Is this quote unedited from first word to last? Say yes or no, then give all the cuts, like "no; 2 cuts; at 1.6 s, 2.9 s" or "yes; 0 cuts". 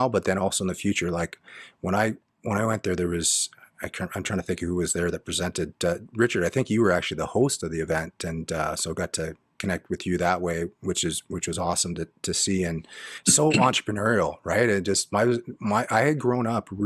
no; 1 cut; at 13.1 s